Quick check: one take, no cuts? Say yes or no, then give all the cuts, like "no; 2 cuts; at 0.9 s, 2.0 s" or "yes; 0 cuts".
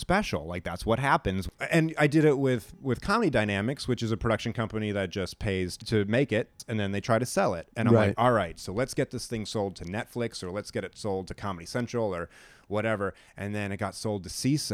no; 3 cuts; at 1.5 s, 5.8 s, 6.6 s